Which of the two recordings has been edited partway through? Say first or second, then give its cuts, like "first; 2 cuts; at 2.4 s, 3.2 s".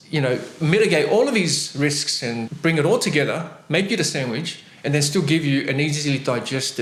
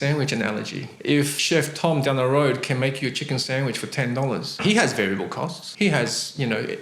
second; 3 cuts; at 1.1 s, 4.6 s, 5.6 s